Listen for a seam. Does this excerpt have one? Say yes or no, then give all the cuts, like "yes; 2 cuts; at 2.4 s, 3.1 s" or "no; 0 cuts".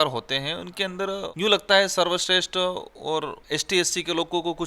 yes; 2 cuts; at 1.3 s, 3.4 s